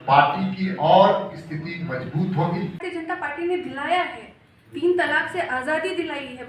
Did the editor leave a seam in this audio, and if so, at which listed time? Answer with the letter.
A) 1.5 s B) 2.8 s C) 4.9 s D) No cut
B